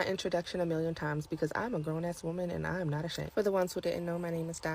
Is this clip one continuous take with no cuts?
no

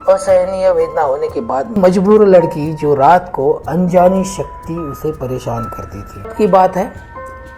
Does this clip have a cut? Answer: yes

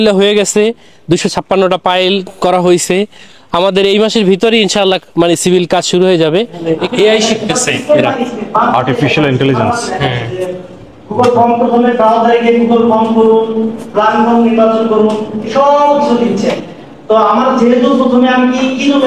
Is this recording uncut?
no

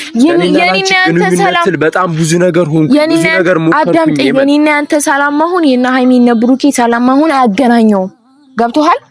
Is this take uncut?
yes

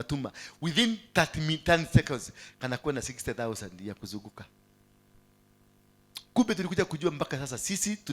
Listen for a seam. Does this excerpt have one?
no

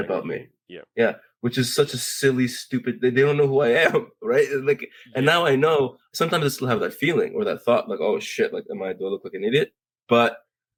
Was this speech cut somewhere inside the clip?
no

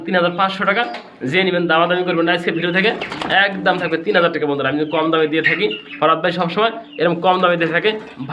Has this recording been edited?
no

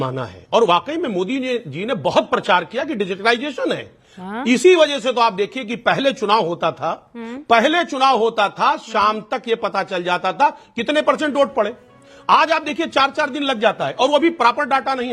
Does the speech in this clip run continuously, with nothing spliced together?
yes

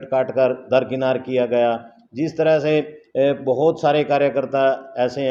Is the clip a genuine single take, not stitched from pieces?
yes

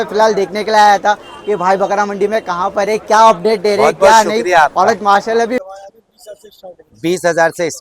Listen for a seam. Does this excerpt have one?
yes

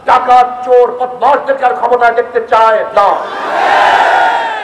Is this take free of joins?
yes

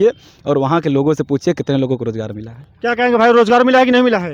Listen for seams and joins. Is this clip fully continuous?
yes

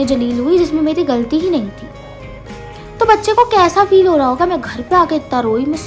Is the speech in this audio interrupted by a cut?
no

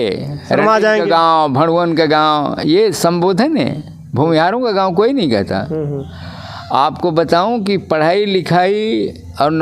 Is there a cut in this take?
no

